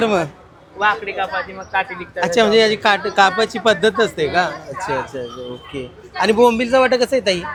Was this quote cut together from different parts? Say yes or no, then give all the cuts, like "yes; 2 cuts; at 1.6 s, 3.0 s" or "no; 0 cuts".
no; 0 cuts